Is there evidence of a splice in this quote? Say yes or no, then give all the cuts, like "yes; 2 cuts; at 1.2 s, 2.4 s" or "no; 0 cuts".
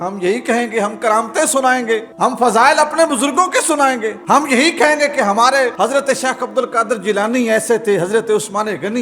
yes; 3 cuts; at 2.1 s, 4.1 s, 5.7 s